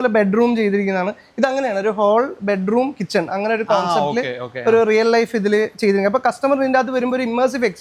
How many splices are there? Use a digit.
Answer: 0